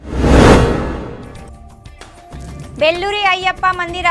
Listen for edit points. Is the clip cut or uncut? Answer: cut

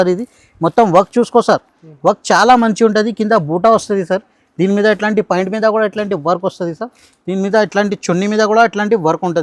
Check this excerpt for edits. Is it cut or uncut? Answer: uncut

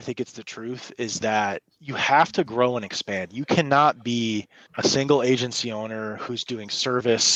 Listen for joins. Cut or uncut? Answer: uncut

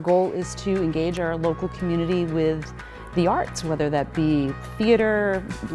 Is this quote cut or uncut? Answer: uncut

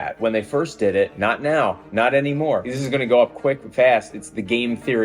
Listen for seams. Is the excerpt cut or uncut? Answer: cut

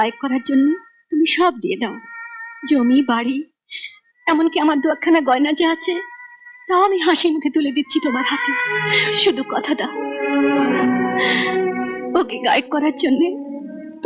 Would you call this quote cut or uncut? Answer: cut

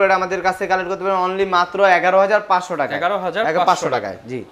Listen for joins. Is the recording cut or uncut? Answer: uncut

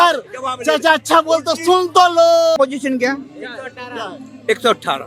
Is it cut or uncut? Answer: cut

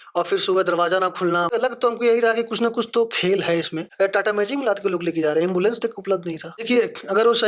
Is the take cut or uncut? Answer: cut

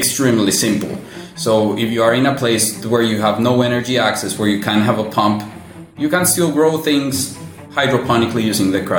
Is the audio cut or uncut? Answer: uncut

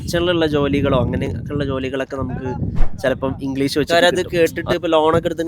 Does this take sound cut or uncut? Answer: cut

